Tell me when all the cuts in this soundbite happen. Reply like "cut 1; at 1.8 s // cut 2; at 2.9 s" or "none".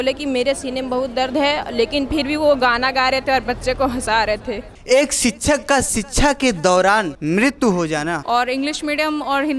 cut 1; at 4.7 s // cut 2; at 7.1 s // cut 3; at 8.2 s